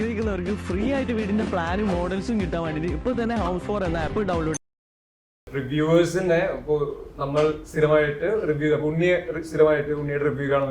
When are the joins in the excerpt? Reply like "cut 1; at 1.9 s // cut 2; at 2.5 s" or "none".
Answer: none